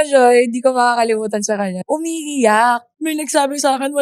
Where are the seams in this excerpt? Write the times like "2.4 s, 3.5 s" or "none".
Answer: 1.8 s, 2.9 s